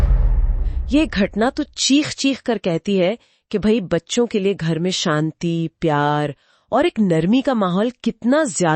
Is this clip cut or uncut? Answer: uncut